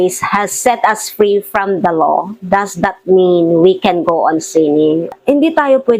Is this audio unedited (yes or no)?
no